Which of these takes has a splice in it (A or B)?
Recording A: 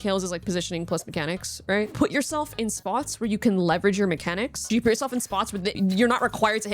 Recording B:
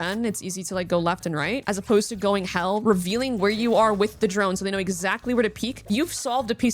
A